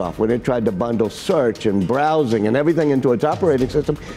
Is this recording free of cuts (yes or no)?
yes